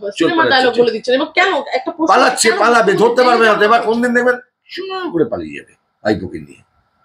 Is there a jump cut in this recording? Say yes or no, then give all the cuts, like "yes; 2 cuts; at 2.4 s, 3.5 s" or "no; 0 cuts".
no; 0 cuts